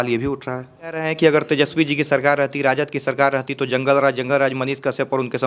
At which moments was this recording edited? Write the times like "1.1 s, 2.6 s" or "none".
1.1 s